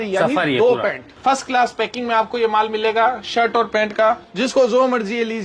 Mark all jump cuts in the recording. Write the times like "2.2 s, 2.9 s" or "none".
1.1 s, 4.3 s